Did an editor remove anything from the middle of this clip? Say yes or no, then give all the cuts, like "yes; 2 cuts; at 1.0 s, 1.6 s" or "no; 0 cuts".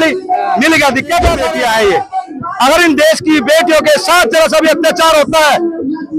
yes; 1 cut; at 1.5 s